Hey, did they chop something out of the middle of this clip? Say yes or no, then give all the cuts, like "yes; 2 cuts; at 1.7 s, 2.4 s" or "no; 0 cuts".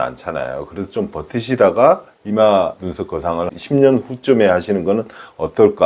no; 0 cuts